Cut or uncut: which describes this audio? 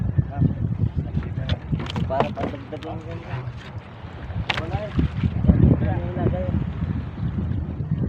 uncut